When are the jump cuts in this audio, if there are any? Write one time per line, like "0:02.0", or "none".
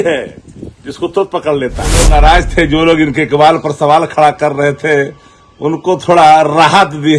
0:02.1